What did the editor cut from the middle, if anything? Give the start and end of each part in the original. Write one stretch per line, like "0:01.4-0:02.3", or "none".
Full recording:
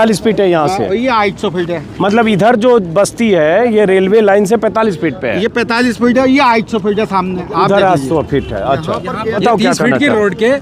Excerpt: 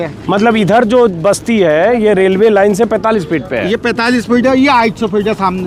none

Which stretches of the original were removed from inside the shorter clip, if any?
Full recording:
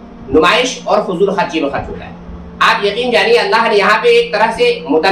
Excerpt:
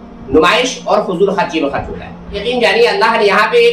0:02.4-0:02.9

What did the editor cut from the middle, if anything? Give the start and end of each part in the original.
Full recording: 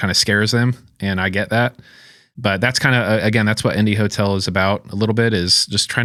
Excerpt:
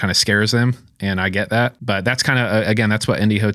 0:01.8-0:02.3

